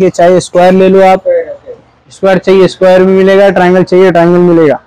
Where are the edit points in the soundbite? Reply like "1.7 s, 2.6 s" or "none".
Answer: none